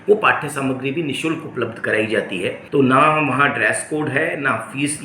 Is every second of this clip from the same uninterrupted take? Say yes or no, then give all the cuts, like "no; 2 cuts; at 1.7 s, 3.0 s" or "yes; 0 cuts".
no; 1 cut; at 2.6 s